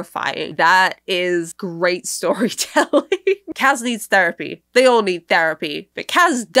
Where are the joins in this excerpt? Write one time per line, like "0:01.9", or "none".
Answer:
0:03.5